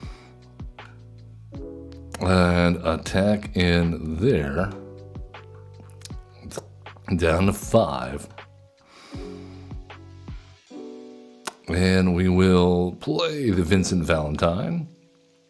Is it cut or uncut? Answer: uncut